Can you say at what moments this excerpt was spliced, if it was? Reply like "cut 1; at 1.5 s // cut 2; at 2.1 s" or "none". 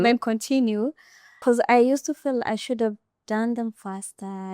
cut 1; at 1.4 s